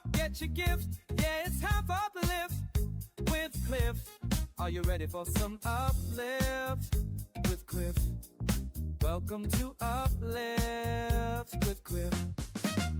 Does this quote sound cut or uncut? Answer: cut